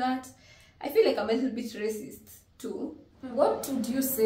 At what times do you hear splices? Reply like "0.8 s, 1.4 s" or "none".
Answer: 3.2 s